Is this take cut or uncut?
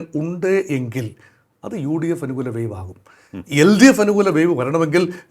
uncut